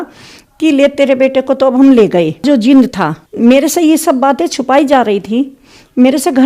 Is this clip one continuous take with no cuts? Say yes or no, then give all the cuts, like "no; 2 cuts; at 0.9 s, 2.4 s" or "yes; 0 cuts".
yes; 0 cuts